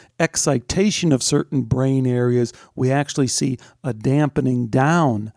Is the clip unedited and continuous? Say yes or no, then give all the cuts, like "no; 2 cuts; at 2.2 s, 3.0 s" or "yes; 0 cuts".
yes; 0 cuts